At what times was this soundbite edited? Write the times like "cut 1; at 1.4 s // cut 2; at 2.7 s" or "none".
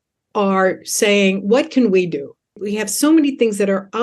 cut 1; at 2.6 s